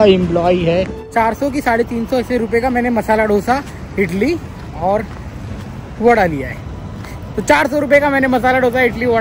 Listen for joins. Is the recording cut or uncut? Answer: cut